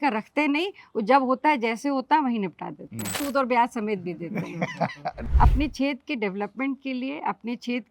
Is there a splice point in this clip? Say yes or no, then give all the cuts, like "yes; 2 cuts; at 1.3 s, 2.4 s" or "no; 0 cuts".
yes; 2 cuts; at 3.2 s, 5.2 s